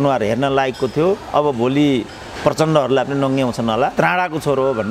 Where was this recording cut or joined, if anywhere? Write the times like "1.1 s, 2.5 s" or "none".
3.9 s